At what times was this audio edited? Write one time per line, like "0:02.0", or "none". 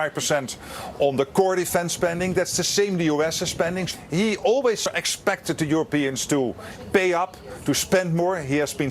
0:04.8

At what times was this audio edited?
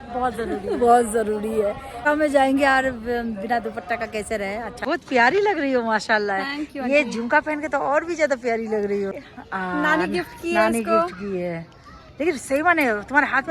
0:02.0
0:04.7
0:09.1

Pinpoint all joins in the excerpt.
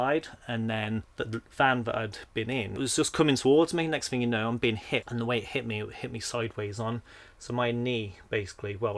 0:01.1
0:02.8
0:05.1

